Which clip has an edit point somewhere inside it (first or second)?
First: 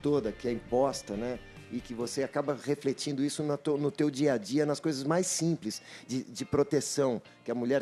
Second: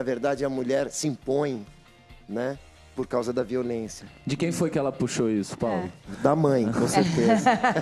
second